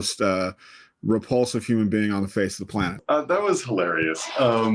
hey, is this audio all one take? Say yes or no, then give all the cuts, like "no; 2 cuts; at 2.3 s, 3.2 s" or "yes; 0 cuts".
no; 1 cut; at 3.0 s